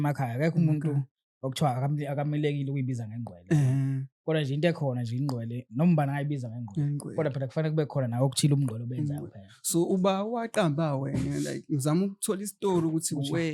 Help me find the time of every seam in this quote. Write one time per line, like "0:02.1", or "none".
none